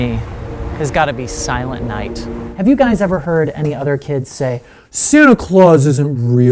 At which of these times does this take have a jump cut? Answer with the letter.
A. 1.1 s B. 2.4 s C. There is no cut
B